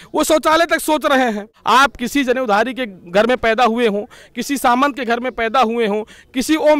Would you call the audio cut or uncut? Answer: cut